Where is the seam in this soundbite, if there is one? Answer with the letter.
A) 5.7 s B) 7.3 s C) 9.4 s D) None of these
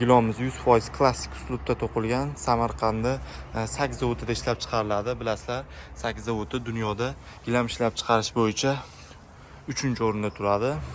D